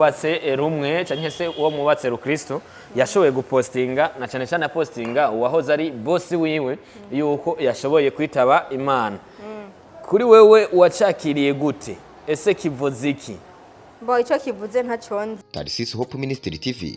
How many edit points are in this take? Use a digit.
1